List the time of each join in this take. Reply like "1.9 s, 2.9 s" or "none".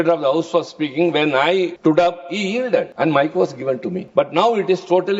1.7 s, 2.9 s, 4.0 s